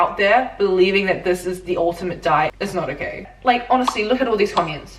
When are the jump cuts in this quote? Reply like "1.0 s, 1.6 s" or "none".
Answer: 2.7 s

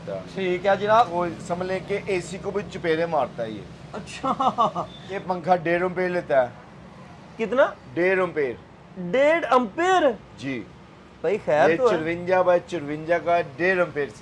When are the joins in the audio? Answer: 1.1 s, 5.2 s

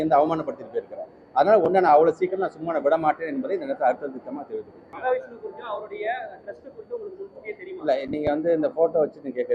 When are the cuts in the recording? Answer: 4.9 s

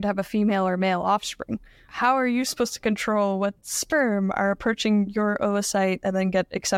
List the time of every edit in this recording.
1.8 s

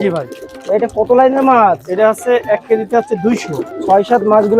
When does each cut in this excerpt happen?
3.7 s

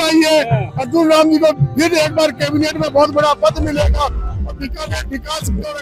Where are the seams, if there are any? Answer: none

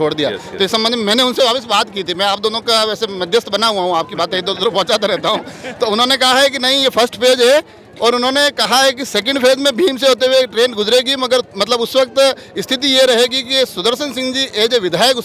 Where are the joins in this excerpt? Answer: none

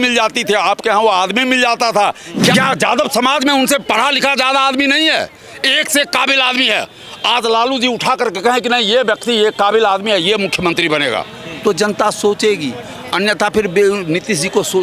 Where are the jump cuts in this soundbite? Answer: 2.5 s

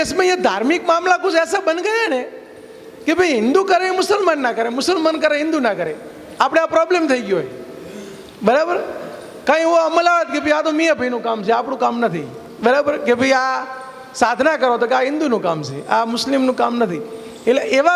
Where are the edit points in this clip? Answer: none

